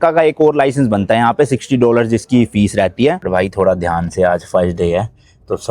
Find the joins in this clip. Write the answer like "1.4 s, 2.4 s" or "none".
3.2 s

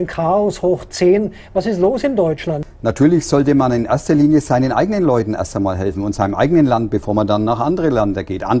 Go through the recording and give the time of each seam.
2.6 s

